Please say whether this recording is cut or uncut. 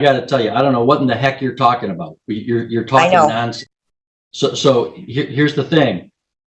uncut